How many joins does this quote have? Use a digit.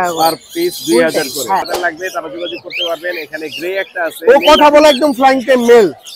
1